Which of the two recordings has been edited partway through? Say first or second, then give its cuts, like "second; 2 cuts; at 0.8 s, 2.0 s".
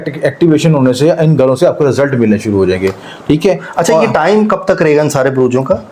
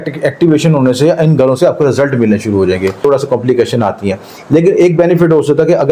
second; 1 cut; at 3.0 s